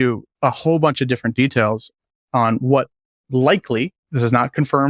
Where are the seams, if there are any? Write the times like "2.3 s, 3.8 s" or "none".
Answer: none